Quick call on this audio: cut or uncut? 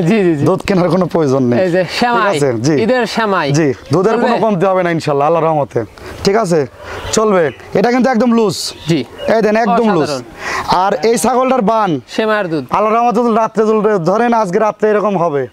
uncut